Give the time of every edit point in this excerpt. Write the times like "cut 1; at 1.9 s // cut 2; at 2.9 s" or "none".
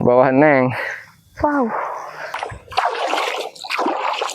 cut 1; at 2.4 s